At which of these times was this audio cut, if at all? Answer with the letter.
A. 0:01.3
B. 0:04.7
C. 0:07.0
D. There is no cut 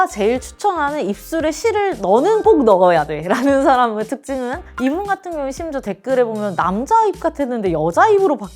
B